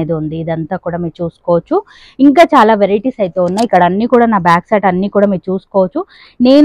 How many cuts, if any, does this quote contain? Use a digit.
0